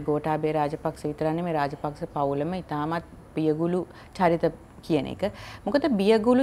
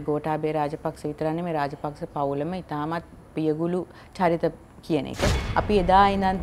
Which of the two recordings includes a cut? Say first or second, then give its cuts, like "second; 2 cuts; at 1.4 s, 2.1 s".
second; 1 cut; at 5.4 s